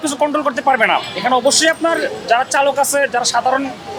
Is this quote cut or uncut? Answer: uncut